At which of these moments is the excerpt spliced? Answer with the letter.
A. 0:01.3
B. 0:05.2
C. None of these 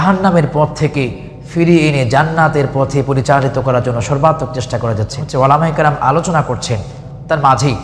B